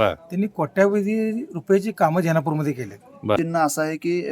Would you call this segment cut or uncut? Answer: cut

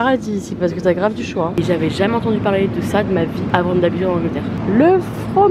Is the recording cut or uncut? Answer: cut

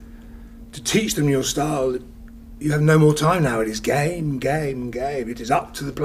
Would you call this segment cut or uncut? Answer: uncut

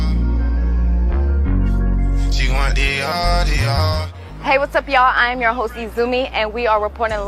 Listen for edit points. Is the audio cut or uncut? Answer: uncut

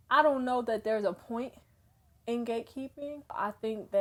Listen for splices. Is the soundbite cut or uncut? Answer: uncut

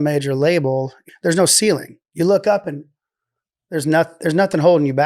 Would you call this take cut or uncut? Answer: cut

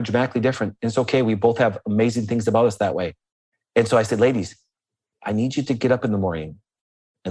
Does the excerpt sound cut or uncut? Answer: uncut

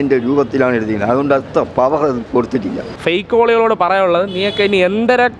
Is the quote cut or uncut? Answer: cut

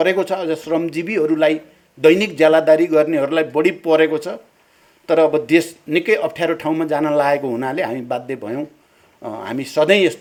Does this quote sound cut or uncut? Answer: uncut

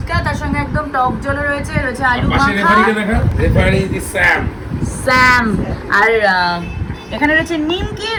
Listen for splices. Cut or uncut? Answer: uncut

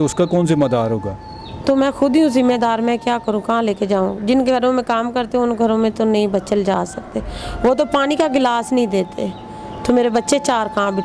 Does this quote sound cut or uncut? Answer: uncut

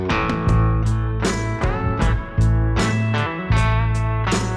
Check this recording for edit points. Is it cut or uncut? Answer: uncut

